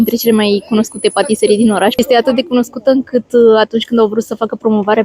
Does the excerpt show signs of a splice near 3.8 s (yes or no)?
no